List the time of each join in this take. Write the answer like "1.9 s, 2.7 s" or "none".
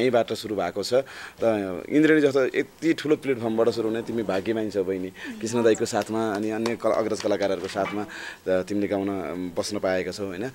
none